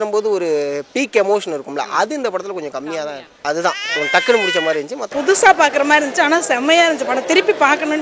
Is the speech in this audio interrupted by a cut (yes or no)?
yes